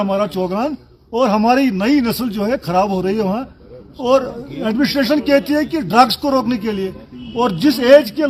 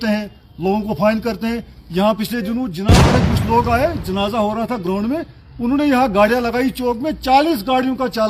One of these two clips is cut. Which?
second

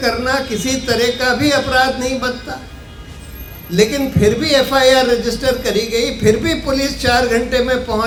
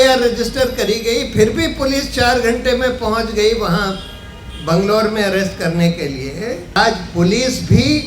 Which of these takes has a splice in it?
second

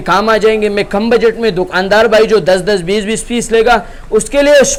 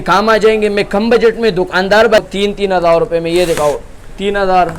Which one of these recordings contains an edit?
second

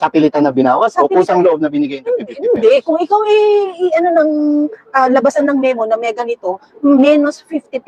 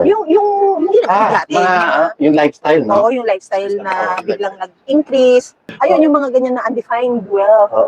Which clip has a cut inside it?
second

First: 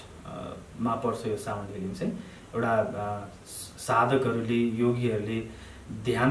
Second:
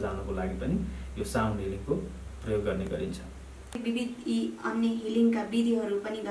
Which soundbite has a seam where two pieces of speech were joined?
second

